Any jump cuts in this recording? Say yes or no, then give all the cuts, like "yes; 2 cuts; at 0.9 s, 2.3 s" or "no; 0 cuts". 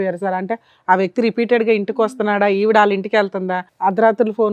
yes; 1 cut; at 3.6 s